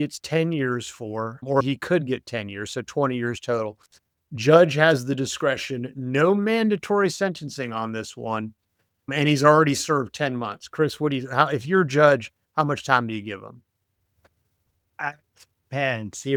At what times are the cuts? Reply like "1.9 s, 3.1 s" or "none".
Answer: none